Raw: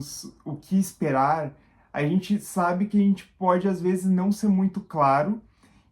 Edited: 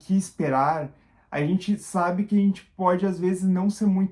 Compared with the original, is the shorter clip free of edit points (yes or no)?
yes